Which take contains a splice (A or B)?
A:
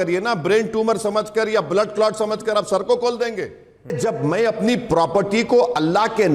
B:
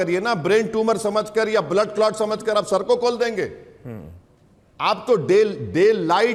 A